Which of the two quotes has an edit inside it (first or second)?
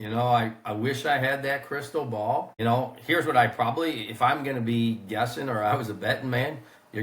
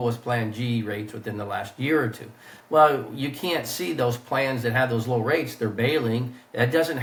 first